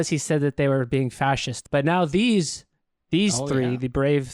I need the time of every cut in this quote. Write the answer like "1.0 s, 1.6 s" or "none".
1.5 s